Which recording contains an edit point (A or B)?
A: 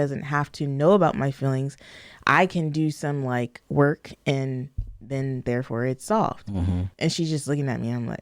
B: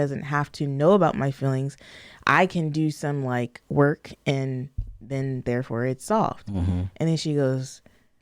A